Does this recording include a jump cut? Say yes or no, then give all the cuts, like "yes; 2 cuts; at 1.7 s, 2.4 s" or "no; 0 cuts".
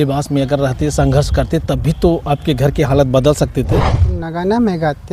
yes; 1 cut; at 4.1 s